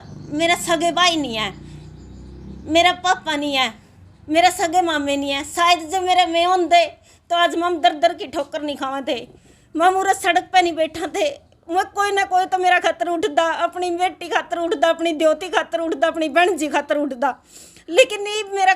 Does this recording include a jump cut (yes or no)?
no